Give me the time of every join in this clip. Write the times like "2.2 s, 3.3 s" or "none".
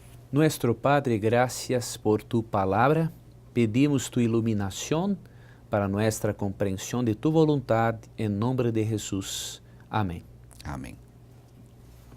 9.2 s

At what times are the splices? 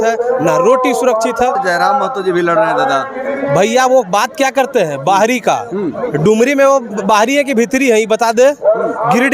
1.5 s

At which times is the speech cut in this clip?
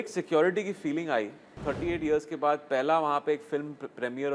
1.5 s

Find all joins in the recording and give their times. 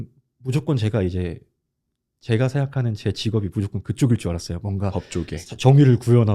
none

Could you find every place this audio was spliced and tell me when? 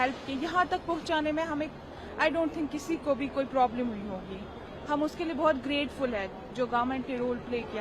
none

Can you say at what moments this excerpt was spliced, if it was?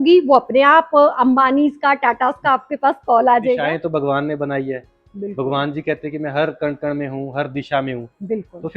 3.6 s

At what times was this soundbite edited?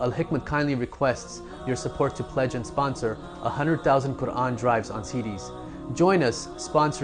none

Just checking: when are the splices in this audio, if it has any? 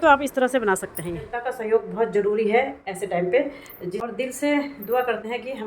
1.5 s, 4.1 s

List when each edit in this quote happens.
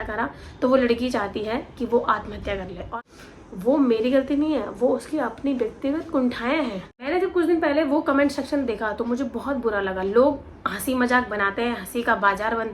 2.9 s, 6.9 s

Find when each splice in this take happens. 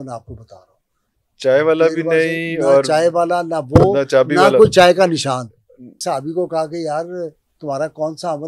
6.0 s

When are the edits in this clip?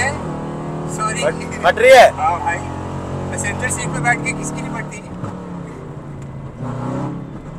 none

